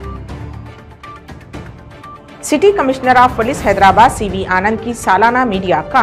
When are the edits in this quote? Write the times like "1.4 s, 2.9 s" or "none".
1.3 s